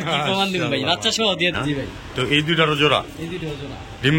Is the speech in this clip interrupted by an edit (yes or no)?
yes